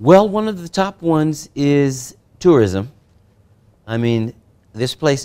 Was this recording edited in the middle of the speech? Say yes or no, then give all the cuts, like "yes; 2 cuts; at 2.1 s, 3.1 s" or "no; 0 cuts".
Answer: no; 0 cuts